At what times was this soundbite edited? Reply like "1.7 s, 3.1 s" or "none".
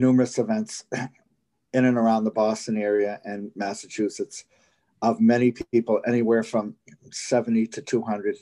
none